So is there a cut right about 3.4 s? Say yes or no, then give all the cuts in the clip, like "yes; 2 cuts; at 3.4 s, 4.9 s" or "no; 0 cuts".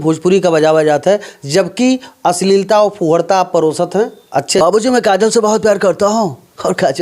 no; 1 cut; at 4.6 s